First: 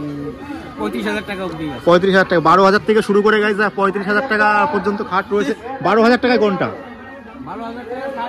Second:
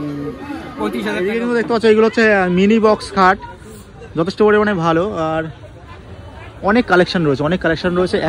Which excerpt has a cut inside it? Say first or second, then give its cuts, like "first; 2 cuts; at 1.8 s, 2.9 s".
second; 1 cut; at 1.3 s